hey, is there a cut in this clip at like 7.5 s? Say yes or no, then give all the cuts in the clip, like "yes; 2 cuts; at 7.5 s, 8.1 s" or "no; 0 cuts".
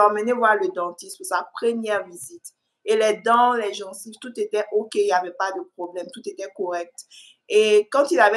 no; 0 cuts